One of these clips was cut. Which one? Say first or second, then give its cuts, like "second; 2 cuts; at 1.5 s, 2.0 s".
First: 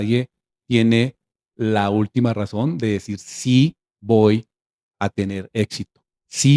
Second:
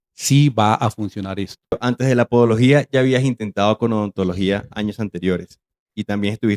second; 1 cut; at 1.8 s